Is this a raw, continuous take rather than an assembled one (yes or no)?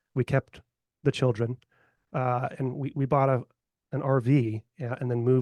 yes